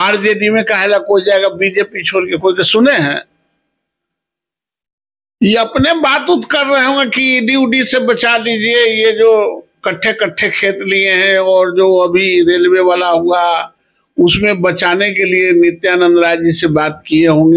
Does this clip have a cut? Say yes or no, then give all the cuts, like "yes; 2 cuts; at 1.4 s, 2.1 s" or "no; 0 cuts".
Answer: no; 0 cuts